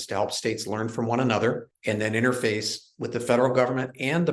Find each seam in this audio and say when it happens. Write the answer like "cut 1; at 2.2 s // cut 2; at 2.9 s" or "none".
cut 1; at 1.7 s